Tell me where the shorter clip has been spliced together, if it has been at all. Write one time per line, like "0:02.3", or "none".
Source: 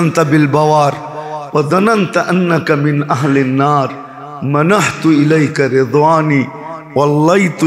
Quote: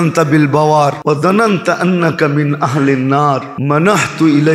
0:01.0
0:03.5